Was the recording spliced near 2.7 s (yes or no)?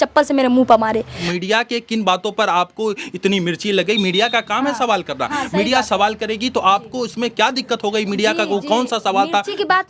no